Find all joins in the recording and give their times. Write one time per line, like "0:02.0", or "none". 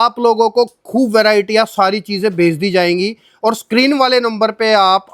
none